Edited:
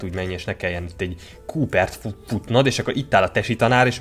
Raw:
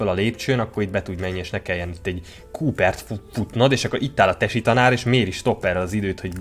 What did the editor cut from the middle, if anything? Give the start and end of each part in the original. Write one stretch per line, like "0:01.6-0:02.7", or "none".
none